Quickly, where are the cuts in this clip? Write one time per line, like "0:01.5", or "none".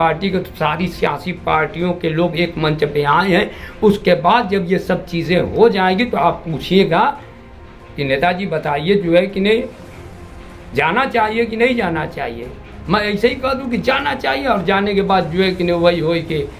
none